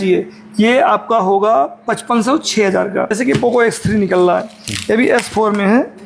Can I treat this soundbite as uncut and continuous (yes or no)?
no